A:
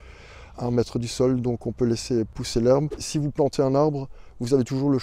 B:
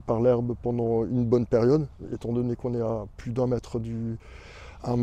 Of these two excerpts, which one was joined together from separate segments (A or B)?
A